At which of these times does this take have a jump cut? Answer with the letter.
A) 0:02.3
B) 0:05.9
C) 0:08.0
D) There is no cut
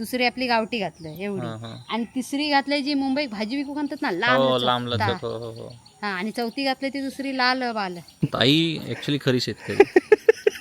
C